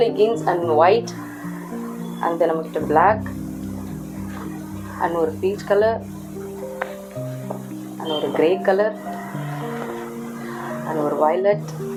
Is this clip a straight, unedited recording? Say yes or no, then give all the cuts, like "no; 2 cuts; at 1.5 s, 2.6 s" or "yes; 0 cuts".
yes; 0 cuts